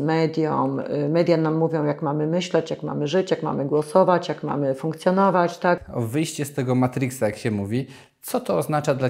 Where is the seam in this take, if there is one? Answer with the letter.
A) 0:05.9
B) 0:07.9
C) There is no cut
A